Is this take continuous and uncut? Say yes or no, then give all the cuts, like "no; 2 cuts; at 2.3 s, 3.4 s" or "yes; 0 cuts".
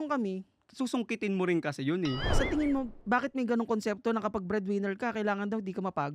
no; 1 cut; at 2.3 s